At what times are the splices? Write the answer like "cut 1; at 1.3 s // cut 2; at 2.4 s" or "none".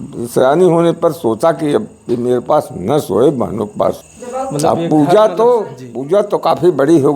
cut 1; at 4.0 s